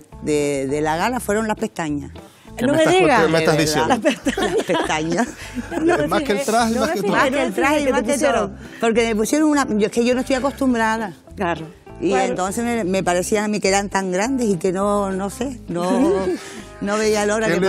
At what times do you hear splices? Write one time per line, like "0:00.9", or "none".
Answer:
none